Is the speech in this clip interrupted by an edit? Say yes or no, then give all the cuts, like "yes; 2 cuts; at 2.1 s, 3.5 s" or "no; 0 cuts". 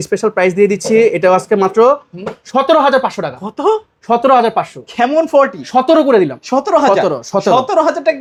no; 0 cuts